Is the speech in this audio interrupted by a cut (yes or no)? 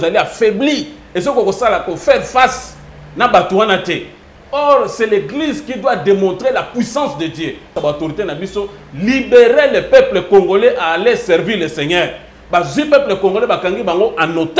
yes